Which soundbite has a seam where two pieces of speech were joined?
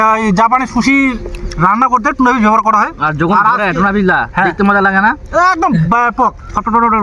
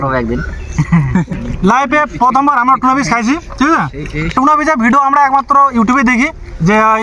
second; 1 cut; at 1.3 s

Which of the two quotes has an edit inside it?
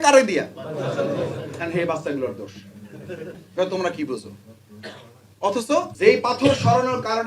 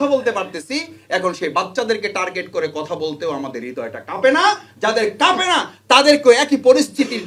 first; 2 cuts; at 3.4 s, 5.9 s

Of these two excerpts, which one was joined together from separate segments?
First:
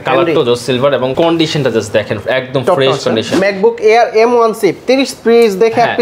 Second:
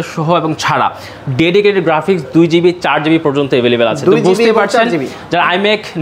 first; 1 cut; at 3.3 s

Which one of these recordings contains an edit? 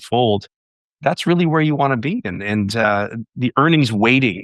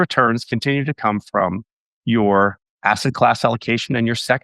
second; 1 cut; at 2.7 s

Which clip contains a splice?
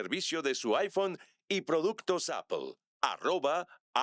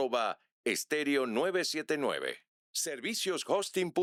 first; 1 cut; at 2.8 s

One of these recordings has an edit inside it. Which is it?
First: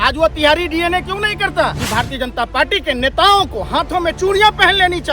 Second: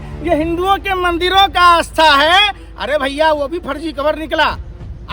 first; 1 cut; at 1.8 s

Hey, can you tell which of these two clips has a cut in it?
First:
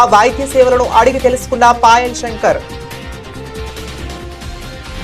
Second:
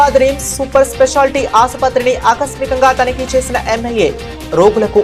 first; 1 cut; at 2.7 s

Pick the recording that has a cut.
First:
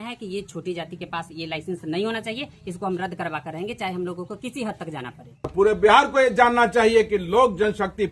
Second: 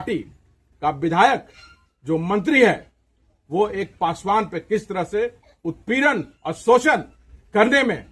first; 1 cut; at 5.5 s

